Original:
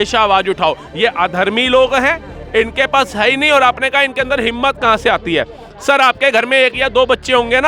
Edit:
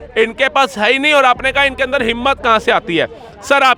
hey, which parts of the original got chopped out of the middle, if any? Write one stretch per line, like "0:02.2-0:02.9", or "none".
none